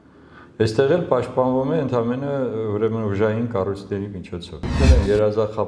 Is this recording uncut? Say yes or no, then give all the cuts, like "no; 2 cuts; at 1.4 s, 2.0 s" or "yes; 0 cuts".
no; 1 cut; at 4.8 s